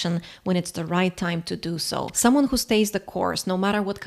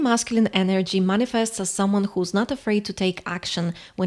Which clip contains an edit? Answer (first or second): first